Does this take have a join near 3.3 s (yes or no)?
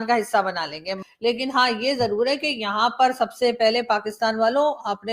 no